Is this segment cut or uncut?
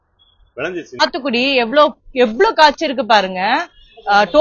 cut